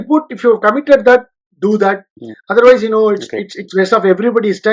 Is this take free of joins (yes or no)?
yes